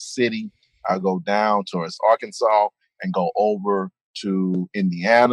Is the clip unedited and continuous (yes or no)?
no